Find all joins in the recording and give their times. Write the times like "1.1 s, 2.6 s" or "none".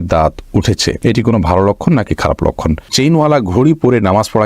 1.0 s, 2.9 s